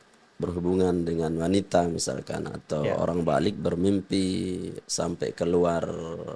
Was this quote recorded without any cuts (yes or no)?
yes